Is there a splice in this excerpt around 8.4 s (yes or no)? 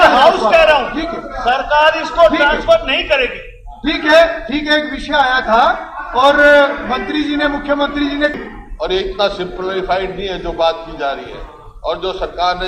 yes